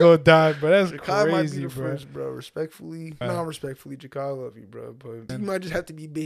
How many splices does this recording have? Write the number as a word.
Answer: two